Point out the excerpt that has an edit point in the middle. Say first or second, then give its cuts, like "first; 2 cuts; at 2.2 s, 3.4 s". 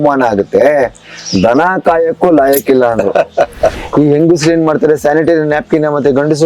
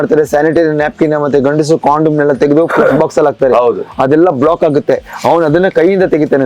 first; 1 cut; at 3.8 s